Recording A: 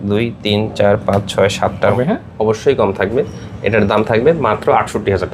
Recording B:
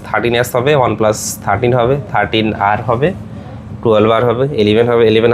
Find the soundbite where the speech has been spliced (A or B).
A